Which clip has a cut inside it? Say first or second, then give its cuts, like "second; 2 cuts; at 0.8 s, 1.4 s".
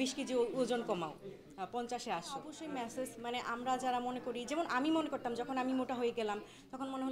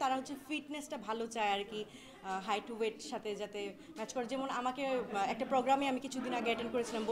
first; 1 cut; at 2.5 s